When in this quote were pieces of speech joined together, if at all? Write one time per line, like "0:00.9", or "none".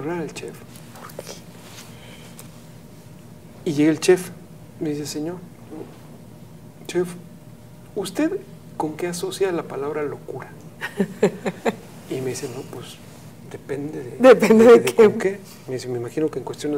none